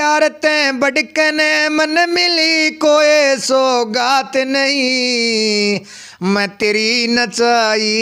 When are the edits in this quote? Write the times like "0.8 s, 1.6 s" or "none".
none